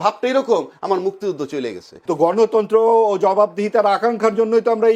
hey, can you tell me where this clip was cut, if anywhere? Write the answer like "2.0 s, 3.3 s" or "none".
1.9 s